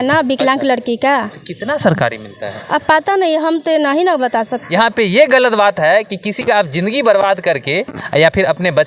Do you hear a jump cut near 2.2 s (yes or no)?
no